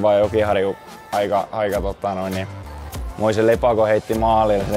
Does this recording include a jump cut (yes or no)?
no